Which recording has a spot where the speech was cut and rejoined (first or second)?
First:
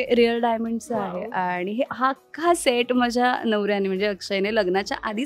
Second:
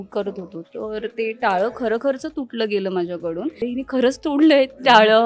second